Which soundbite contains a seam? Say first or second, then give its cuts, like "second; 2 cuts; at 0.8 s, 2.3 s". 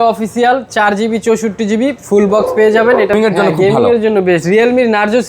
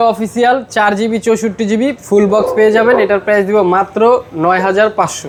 first; 1 cut; at 3.1 s